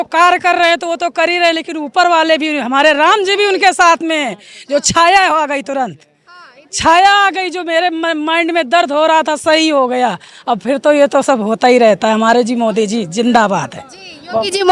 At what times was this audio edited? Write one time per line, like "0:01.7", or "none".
none